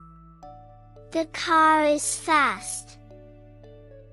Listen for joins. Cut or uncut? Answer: cut